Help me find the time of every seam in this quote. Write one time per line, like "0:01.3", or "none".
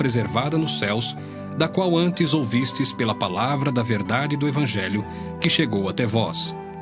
0:04.9